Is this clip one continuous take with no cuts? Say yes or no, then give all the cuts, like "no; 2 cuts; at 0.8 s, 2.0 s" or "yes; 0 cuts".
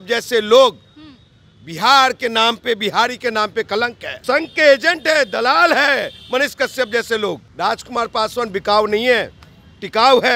no; 2 cuts; at 4.2 s, 7.5 s